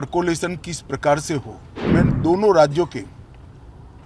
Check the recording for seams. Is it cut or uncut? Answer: cut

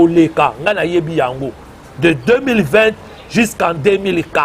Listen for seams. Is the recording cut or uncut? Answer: uncut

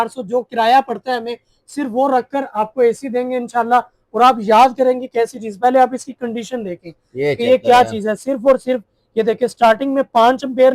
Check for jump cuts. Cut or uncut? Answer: uncut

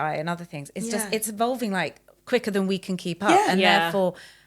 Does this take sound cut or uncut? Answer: uncut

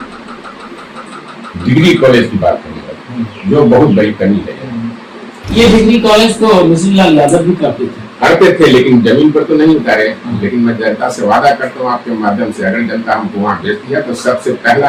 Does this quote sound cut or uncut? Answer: uncut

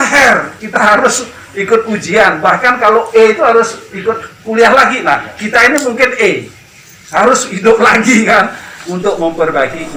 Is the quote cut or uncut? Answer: uncut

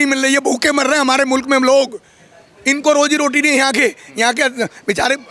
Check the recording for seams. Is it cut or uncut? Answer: uncut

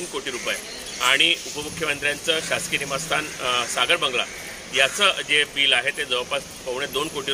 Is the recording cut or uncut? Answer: uncut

